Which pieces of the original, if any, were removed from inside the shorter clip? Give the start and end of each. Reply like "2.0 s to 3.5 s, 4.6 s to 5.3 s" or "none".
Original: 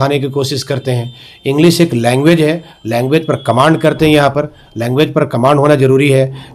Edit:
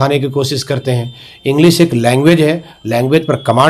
none